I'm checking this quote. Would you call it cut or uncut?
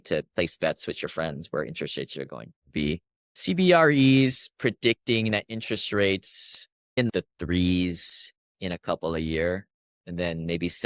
uncut